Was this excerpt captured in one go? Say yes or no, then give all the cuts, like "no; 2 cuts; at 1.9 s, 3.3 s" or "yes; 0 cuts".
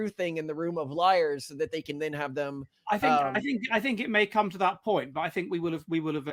yes; 0 cuts